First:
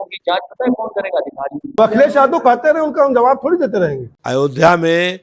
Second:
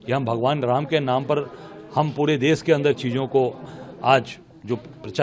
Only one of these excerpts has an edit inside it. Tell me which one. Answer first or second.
first